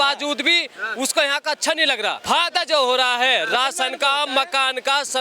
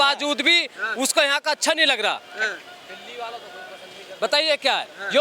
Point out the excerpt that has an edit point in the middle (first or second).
first